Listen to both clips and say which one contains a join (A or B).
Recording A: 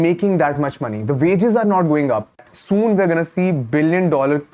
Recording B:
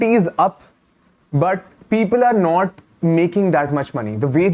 A